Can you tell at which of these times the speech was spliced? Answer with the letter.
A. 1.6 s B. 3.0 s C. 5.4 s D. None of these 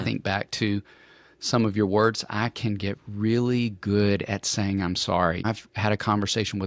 C